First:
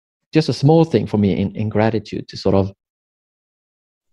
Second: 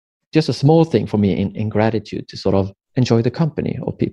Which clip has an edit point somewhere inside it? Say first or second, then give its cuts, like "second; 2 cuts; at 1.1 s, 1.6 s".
second; 1 cut; at 2.8 s